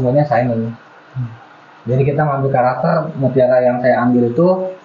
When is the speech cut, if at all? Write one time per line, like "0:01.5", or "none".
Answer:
none